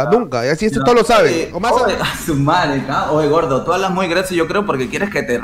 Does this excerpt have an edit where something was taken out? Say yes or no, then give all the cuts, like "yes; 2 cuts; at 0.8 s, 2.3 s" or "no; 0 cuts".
yes; 1 cut; at 1.5 s